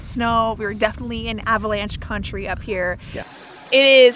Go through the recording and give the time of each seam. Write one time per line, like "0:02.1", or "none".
0:03.2